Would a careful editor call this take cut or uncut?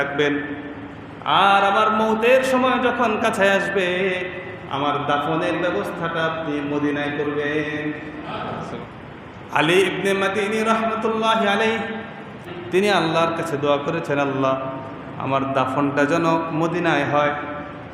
cut